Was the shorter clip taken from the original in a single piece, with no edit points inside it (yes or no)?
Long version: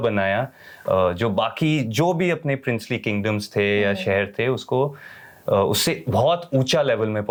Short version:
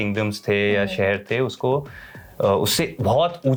yes